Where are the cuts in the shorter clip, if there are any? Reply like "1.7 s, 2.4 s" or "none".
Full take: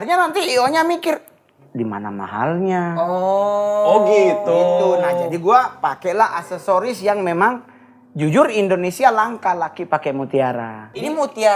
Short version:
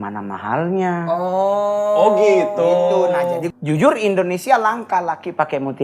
3.4 s